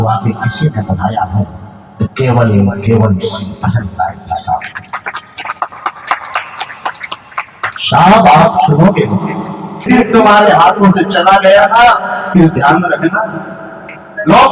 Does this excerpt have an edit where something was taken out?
yes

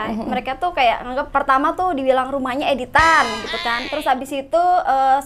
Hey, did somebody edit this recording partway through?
yes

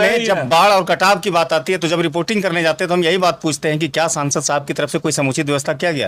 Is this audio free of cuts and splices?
yes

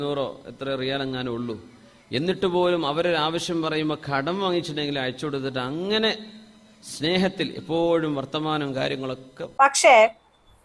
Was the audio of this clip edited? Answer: yes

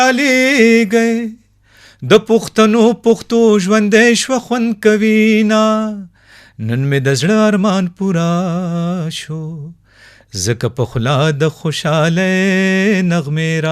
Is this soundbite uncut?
yes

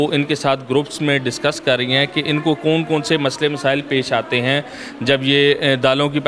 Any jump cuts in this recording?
no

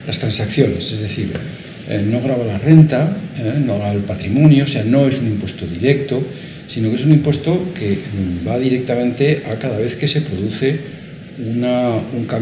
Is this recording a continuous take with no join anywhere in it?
no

